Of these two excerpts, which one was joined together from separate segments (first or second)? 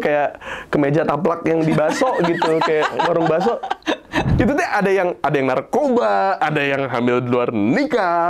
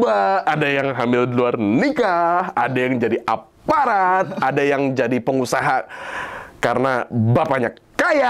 first